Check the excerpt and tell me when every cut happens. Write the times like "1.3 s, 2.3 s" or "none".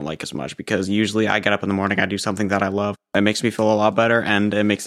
3.1 s